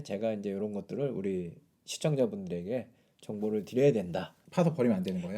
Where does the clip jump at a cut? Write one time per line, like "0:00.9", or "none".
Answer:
0:04.4